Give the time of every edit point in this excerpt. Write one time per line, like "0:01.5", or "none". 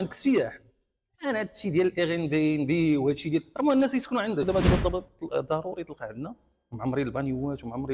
0:04.5